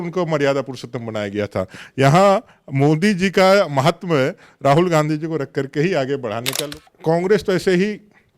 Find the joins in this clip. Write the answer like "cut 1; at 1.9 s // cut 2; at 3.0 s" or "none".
cut 1; at 6.6 s